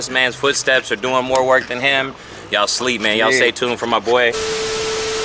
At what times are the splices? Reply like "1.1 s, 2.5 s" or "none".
4.4 s